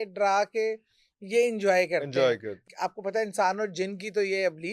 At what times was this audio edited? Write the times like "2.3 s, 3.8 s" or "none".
2.7 s